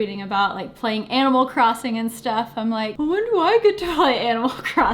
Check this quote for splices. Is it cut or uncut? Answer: cut